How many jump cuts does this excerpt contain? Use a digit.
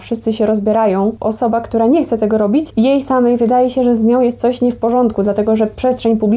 2